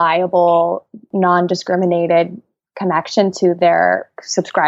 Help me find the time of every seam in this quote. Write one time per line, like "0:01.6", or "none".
0:01.0